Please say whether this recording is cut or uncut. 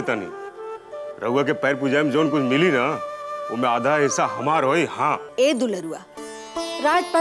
cut